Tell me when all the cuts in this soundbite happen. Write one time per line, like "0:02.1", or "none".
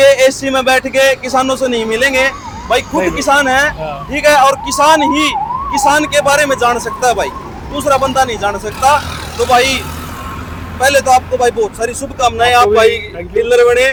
none

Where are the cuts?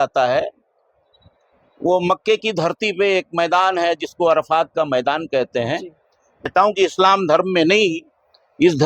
0:06.5

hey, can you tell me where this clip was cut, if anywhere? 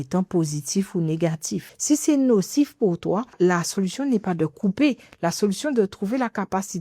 0:01.7
0:03.3

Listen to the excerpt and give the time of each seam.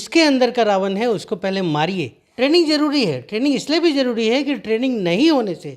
0:02.2

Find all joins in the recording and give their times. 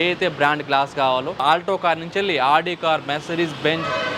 0:01.4

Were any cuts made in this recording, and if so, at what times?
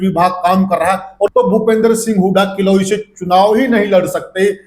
0:01.3

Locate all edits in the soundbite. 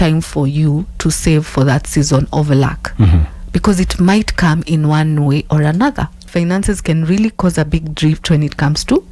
0:06.3

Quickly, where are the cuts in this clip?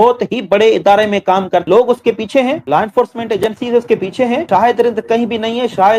0:01.6

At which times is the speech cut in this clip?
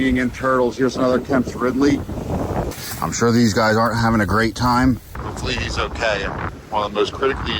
0:02.7
0:05.2
0:06.5

